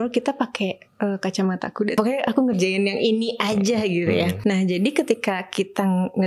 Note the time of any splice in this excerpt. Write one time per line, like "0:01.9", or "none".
0:01.9
0:04.4